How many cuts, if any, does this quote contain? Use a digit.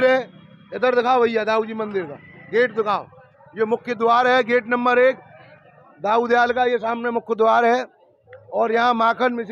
0